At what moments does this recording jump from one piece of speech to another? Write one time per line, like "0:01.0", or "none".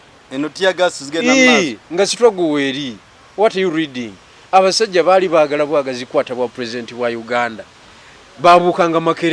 none